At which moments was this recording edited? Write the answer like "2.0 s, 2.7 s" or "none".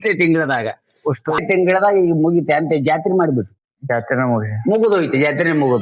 1.4 s